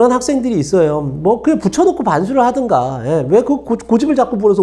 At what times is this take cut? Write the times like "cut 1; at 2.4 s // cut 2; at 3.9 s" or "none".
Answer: none